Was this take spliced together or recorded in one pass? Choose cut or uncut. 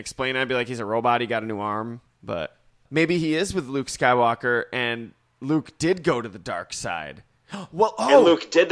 cut